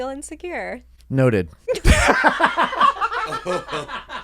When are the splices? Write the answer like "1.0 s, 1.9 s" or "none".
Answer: 0.9 s, 1.6 s